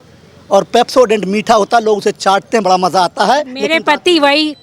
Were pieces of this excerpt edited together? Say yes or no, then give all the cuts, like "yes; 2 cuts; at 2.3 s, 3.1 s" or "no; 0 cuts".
no; 0 cuts